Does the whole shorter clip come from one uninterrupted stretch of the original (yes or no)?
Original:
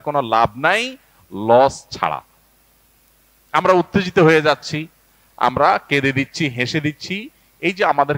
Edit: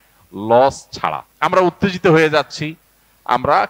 no